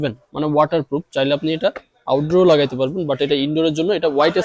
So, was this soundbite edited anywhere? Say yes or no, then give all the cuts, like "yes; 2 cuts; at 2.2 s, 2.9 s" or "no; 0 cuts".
no; 0 cuts